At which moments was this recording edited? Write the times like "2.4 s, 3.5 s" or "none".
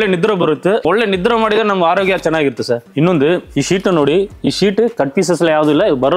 2.9 s